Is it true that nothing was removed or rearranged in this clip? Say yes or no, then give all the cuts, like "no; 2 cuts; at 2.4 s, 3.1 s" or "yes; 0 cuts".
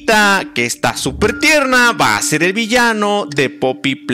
yes; 0 cuts